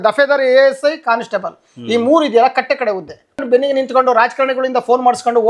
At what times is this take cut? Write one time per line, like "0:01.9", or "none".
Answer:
0:03.4